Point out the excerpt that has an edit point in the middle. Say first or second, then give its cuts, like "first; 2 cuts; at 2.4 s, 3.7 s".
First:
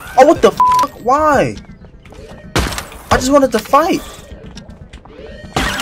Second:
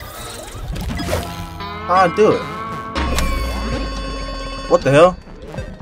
second; 1 cut; at 4.7 s